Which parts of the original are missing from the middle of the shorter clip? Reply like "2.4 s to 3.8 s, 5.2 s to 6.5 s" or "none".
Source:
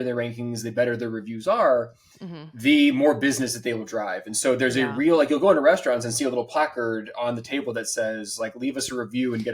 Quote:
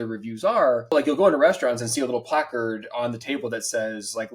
2.0 s to 5.2 s